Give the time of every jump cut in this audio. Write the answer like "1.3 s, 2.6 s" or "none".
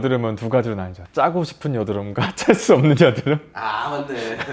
none